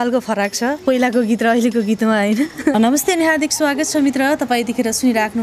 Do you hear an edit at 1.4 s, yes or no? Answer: no